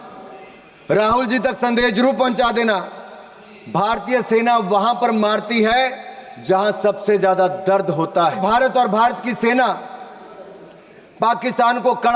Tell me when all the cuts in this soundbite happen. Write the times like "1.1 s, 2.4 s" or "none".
8.4 s